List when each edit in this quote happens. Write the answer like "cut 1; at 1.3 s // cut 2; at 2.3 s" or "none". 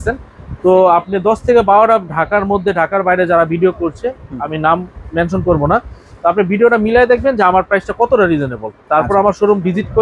none